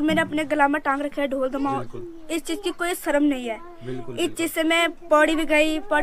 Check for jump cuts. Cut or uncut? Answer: uncut